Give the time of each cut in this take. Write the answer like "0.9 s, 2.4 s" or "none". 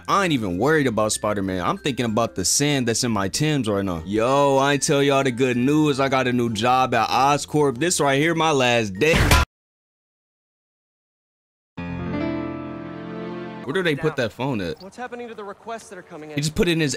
13.6 s